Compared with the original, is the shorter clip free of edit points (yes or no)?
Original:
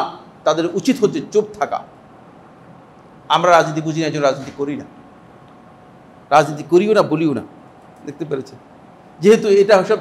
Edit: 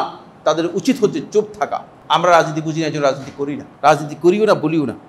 no